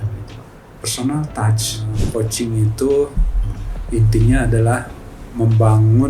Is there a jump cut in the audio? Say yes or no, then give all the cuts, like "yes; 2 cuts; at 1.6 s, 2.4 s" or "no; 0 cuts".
yes; 1 cut; at 2.0 s